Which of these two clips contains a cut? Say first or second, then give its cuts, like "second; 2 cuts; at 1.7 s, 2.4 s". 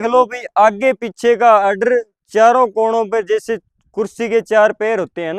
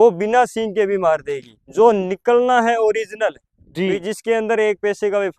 second; 1 cut; at 1.5 s